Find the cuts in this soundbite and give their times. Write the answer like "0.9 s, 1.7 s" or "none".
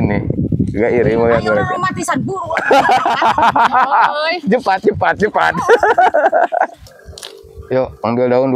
6.9 s